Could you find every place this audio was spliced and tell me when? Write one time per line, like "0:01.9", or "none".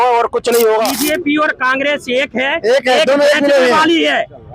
0:01.0